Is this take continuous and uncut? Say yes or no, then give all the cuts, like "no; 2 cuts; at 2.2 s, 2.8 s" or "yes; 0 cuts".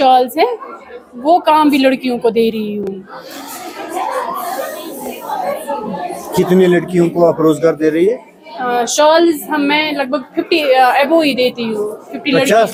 yes; 0 cuts